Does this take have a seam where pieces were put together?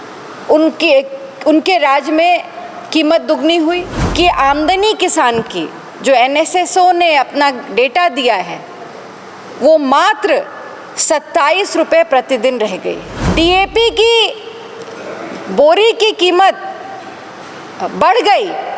yes; 2 cuts; at 4.0 s, 13.1 s

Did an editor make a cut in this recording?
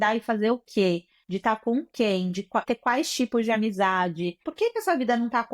yes; 2 cuts; at 2.6 s, 4.4 s

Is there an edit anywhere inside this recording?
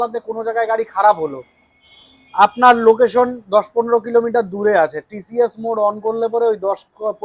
no; 0 cuts

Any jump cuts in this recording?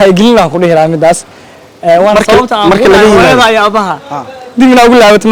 no; 0 cuts

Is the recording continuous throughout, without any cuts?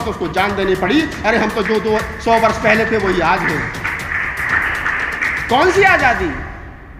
no; 1 cut; at 4.5 s

